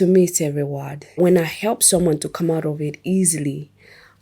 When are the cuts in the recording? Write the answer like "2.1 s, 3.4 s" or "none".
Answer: 1.2 s